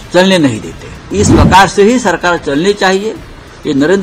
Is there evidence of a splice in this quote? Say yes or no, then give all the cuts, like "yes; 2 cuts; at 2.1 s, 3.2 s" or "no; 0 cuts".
yes; 1 cut; at 1.1 s